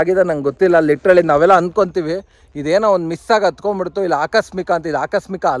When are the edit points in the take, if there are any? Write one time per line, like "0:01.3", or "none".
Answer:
none